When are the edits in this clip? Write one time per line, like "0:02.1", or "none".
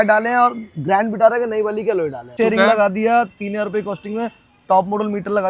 0:02.3

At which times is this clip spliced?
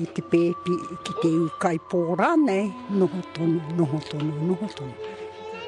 none

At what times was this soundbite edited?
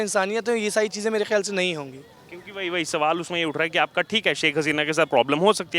none

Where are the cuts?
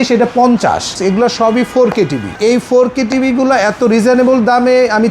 0:01.0
0:02.4

